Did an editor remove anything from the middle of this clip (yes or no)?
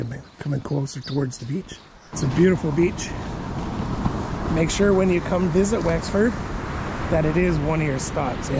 yes